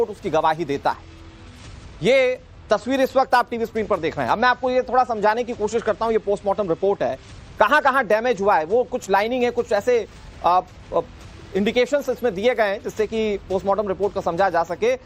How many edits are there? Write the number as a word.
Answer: one